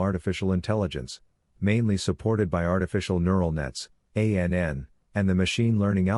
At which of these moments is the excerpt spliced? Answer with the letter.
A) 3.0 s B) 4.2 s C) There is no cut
C